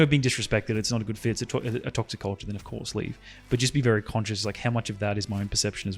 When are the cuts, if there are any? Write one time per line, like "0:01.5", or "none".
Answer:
none

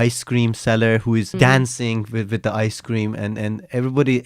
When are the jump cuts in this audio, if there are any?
0:01.3

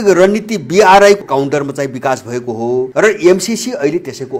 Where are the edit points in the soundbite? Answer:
0:01.2
0:02.9

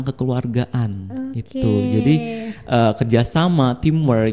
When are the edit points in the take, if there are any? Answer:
none

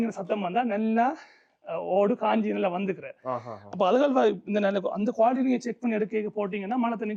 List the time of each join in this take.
none

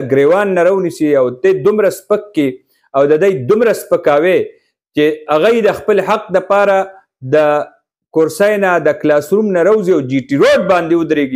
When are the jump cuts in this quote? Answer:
none

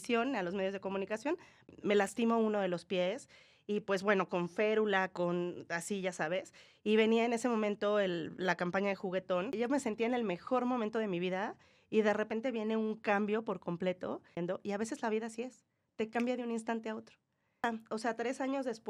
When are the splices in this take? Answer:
0:01.7
0:09.5
0:14.4
0:17.6

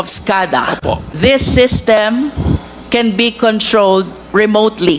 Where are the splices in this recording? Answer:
0:01.1

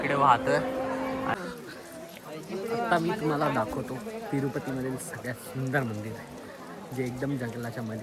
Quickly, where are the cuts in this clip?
0:01.3

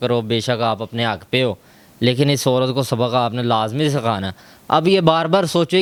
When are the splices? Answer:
none

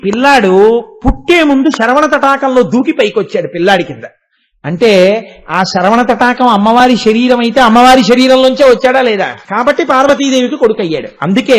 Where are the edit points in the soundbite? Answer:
0:09.4

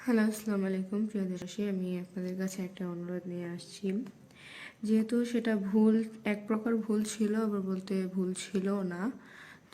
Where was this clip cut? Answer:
0:01.4

